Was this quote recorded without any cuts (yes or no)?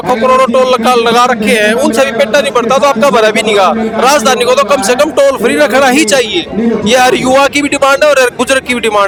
yes